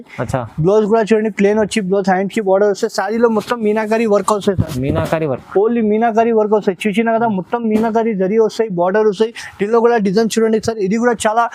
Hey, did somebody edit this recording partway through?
no; 0 cuts

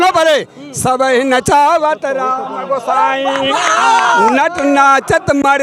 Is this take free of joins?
yes; 0 cuts

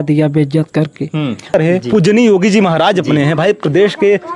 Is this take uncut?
no; 1 cut; at 1.5 s

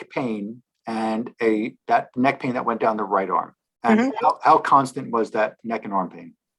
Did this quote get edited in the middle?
yes; 1 cut; at 3.6 s

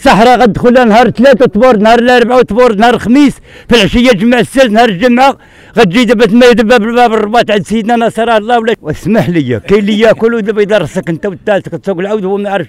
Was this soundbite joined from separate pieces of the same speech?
yes; 1 cut; at 8.8 s

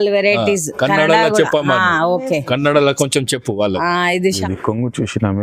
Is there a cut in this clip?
yes; 1 cut; at 4.3 s

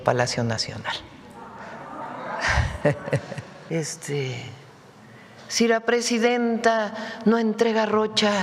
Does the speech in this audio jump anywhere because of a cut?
yes; 1 cut; at 3.5 s

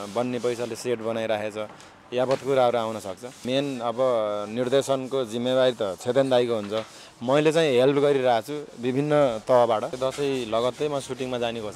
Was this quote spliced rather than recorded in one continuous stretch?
yes; 2 cuts; at 3.4 s, 9.9 s

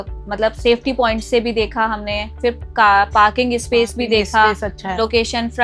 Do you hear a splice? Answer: no; 0 cuts

